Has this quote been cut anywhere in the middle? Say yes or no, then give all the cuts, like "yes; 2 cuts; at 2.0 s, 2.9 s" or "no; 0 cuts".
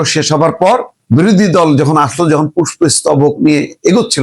yes; 1 cut; at 0.9 s